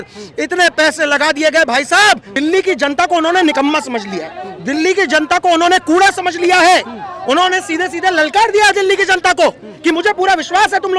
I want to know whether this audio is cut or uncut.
cut